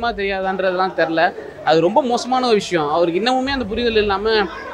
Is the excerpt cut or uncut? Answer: uncut